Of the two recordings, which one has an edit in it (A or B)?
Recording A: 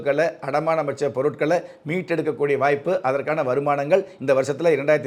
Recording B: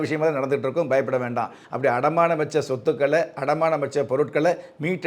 B